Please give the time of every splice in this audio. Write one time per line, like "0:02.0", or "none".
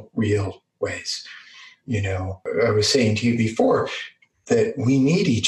0:02.5